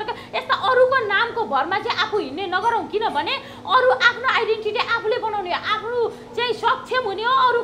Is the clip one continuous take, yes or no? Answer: yes